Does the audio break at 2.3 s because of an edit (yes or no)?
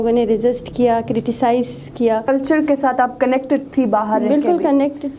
yes